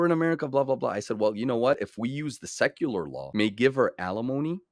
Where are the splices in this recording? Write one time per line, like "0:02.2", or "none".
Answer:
0:03.2